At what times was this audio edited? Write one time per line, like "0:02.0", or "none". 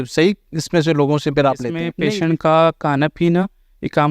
0:01.9

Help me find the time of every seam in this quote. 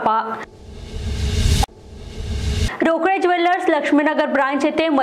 none

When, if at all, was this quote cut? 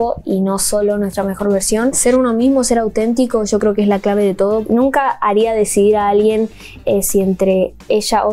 0:02.0
0:04.6

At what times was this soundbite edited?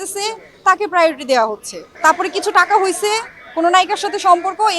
0:01.9

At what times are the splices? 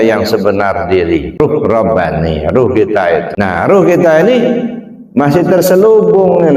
0:01.4
0:03.3

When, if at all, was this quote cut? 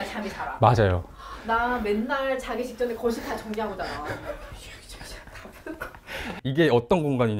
0:06.3

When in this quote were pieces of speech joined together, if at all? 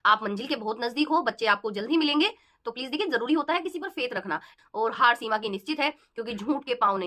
0:04.6

